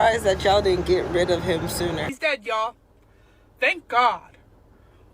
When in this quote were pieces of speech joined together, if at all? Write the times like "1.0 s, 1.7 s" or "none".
2.1 s